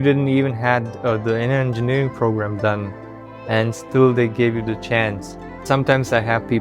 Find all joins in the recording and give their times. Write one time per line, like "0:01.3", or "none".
0:05.6